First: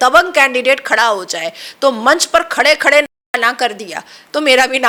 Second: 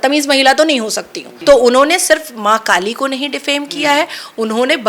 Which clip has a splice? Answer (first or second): second